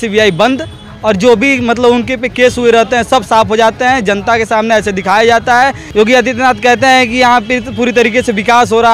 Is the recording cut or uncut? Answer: cut